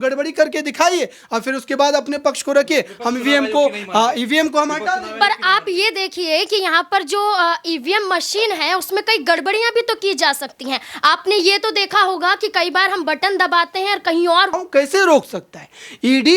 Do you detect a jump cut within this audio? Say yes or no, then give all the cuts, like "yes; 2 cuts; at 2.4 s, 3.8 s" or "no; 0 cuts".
yes; 1 cut; at 14.6 s